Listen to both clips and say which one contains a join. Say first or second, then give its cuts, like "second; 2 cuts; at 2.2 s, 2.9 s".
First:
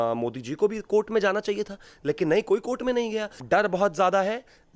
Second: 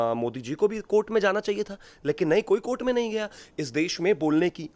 first; 1 cut; at 3.4 s